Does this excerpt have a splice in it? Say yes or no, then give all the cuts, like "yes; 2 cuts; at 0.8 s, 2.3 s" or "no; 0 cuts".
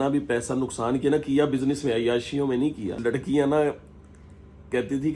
yes; 1 cut; at 3.0 s